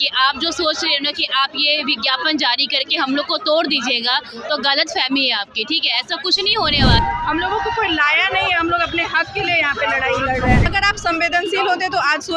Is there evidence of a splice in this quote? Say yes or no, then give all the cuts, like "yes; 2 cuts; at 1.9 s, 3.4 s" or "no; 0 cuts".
yes; 2 cuts; at 7.0 s, 10.7 s